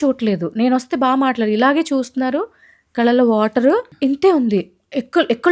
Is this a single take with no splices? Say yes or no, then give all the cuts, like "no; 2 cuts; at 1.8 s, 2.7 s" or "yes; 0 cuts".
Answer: no; 1 cut; at 3.9 s